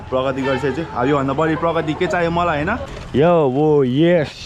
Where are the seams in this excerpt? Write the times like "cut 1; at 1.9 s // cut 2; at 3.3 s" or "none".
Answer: cut 1; at 2.9 s